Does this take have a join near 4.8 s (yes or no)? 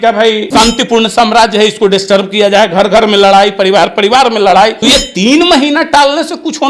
yes